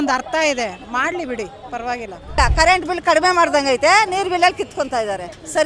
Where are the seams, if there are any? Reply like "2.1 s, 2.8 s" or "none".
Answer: 2.4 s